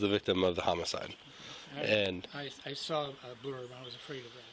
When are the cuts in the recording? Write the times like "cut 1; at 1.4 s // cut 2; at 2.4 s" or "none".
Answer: none